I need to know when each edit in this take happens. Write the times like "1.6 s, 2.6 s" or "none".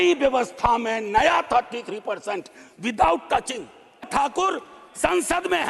4.0 s